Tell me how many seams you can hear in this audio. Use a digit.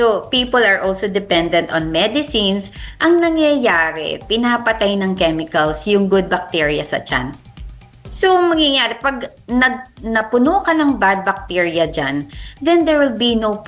0